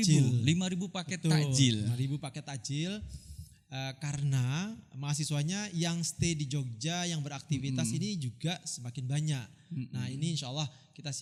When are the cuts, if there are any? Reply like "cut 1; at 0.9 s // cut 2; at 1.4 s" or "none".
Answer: none